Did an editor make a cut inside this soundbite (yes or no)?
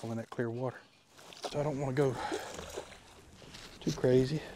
yes